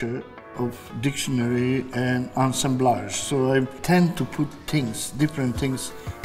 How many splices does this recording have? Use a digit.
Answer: 1